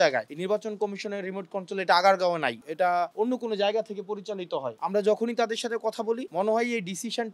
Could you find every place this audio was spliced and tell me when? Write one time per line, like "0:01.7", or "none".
none